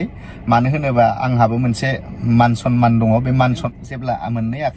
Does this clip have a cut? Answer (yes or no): yes